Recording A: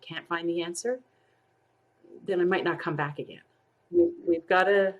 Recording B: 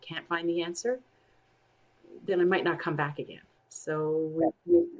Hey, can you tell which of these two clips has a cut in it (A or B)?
A